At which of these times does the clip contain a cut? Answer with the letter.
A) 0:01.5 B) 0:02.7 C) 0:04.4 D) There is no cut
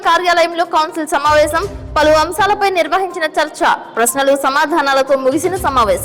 D